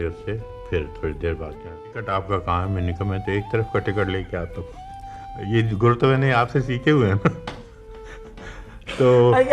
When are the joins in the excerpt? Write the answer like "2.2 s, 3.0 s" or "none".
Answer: 2.0 s